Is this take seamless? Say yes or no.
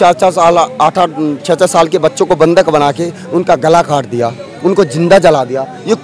yes